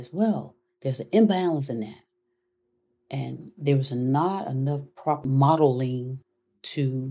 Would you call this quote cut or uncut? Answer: cut